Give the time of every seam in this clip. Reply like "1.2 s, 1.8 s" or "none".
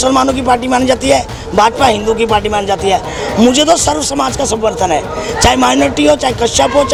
none